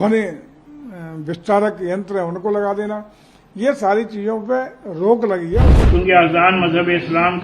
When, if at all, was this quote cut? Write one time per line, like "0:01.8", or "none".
0:05.7